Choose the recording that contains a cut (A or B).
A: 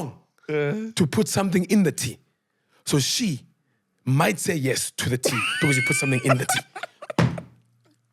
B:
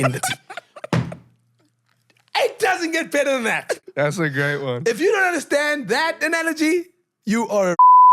B